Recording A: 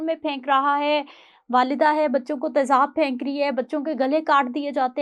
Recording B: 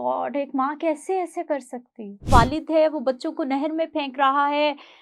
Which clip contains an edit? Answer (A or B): B